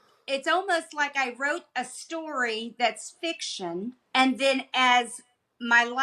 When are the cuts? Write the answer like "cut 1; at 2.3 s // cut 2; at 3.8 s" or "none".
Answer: cut 1; at 4.0 s